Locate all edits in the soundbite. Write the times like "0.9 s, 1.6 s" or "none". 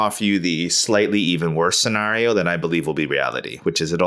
none